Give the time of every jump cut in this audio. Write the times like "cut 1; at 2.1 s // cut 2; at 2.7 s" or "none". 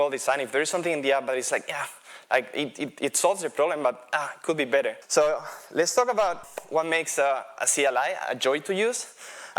cut 1; at 5.0 s // cut 2; at 6.4 s